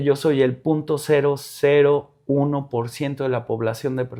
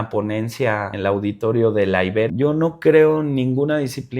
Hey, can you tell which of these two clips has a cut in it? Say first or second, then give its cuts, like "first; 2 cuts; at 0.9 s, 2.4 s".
second; 2 cuts; at 0.9 s, 2.3 s